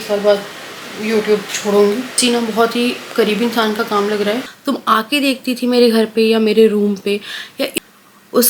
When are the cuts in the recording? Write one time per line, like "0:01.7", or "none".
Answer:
0:02.2
0:04.5
0:07.7